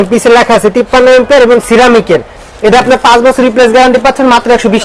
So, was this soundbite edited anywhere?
no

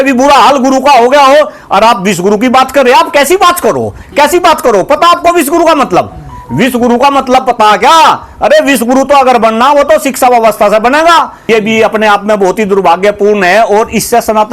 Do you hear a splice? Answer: yes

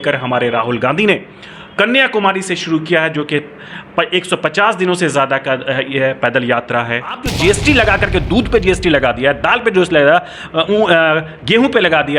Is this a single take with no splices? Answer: no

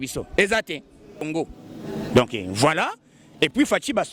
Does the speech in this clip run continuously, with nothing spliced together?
no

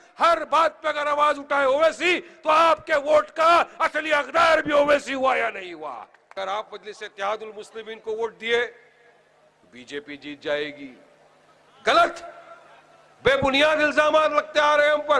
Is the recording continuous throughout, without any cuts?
no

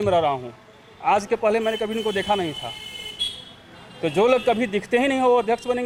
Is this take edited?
no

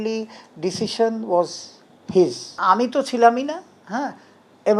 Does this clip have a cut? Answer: yes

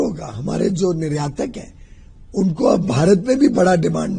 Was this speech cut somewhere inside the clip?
no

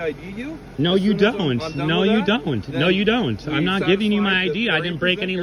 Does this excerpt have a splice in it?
no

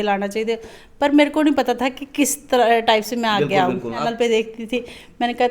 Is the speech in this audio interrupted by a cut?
yes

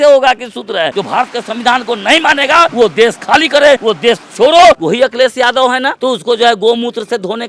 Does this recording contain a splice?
yes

